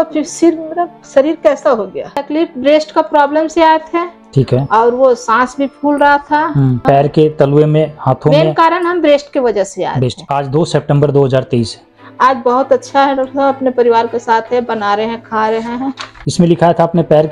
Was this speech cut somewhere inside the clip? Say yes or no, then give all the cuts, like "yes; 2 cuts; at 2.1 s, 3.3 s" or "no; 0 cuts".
yes; 3 cuts; at 2.0 s, 10.2 s, 16.2 s